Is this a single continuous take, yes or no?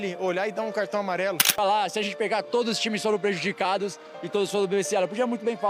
no